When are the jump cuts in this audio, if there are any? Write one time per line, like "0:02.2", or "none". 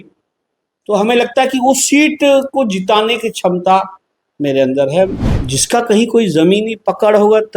0:05.2